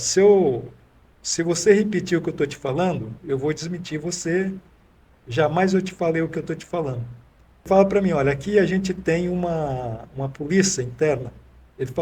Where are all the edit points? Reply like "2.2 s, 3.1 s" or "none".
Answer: 7.7 s